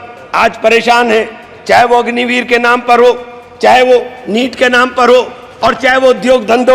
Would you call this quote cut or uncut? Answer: uncut